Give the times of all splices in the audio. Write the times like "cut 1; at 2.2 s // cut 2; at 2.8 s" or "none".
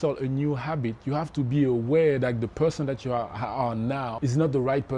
none